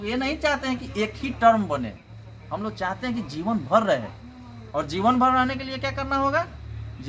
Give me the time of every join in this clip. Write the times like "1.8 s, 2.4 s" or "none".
none